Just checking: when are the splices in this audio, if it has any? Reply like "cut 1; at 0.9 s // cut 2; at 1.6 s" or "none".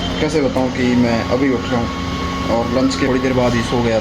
cut 1; at 3.1 s